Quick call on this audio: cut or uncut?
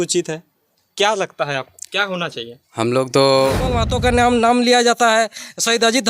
cut